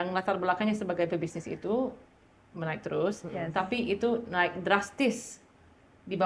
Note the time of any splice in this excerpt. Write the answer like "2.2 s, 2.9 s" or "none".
none